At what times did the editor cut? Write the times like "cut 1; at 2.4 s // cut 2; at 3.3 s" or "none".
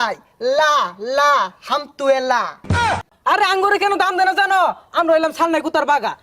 cut 1; at 3.1 s